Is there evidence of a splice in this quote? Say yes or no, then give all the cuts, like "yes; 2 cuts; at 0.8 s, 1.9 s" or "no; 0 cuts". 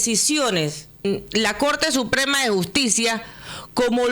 yes; 1 cut; at 1.0 s